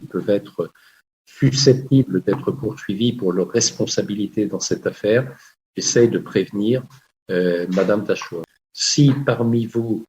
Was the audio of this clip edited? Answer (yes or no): yes